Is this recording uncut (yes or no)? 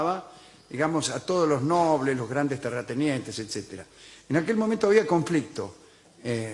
no